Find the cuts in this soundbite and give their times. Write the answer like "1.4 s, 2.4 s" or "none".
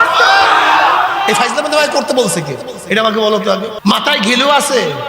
3.7 s